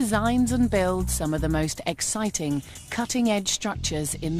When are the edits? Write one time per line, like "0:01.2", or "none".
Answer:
0:03.1

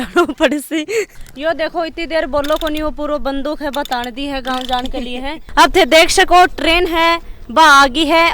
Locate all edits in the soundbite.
0:01.2
0:05.3

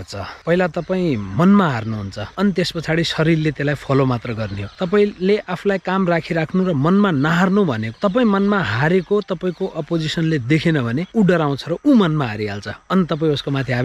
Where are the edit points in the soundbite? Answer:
none

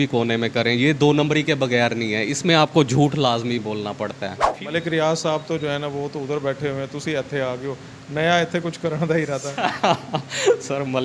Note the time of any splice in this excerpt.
0:04.5

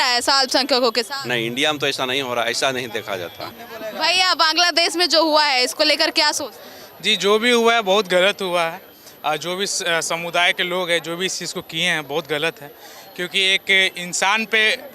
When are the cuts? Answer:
0:03.4

